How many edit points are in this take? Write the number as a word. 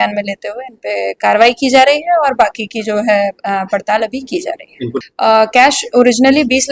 one